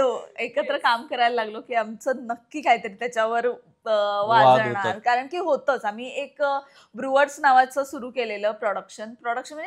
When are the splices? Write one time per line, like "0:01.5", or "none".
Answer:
none